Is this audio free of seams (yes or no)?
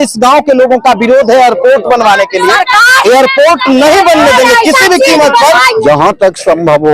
no